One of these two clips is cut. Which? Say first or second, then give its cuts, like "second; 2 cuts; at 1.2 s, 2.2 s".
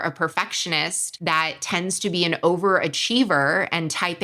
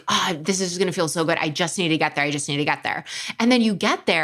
first; 1 cut; at 1.0 s